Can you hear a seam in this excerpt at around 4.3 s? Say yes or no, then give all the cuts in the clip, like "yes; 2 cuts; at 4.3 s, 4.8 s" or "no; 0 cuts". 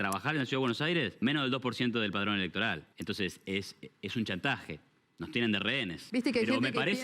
no; 3 cuts; at 1.3 s, 2.9 s, 6.0 s